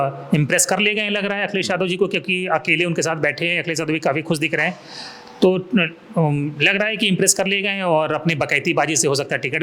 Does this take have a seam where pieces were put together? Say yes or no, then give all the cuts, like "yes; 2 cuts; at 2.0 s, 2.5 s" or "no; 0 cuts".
no; 0 cuts